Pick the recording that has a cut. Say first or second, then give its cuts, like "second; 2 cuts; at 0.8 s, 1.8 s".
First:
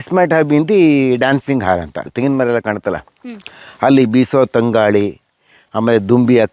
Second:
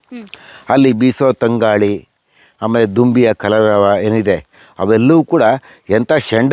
first; 1 cut; at 2.1 s